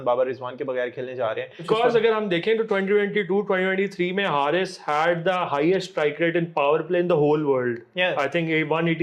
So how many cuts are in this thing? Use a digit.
1